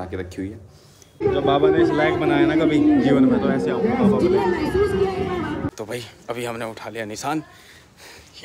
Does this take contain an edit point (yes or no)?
yes